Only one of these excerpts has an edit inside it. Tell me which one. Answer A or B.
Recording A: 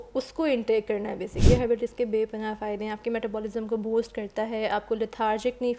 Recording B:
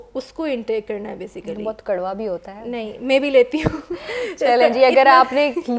A